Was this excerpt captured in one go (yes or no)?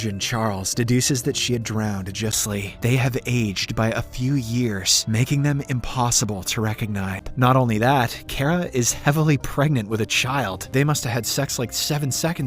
no